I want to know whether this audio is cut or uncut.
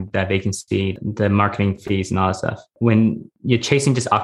cut